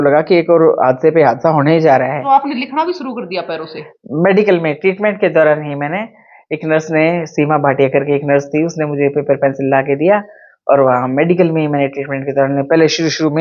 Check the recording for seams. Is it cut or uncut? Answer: cut